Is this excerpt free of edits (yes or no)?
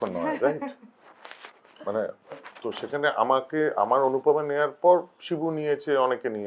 yes